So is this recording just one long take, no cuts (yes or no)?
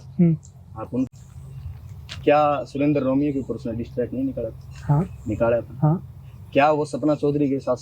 no